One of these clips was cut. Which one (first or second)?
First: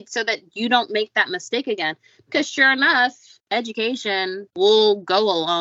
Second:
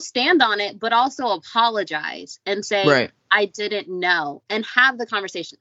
first